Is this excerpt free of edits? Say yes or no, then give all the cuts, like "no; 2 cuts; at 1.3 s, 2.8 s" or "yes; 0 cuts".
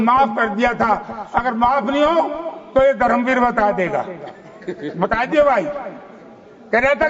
yes; 0 cuts